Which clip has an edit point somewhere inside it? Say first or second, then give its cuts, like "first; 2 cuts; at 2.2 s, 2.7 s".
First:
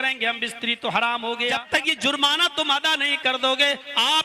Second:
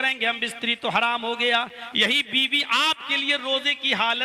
first; 1 cut; at 1.6 s